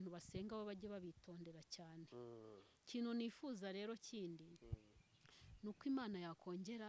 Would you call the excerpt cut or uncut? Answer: uncut